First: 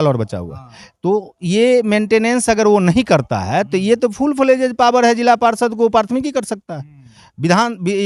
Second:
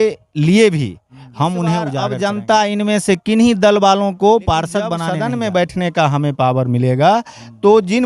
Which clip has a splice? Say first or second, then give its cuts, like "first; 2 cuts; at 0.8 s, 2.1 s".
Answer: second; 2 cuts; at 1.9 s, 5.0 s